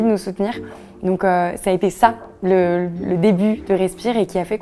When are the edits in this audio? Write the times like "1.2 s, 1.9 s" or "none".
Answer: none